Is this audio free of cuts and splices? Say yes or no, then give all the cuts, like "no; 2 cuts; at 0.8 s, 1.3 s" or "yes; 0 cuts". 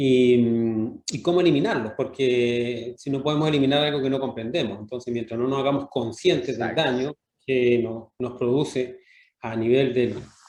yes; 0 cuts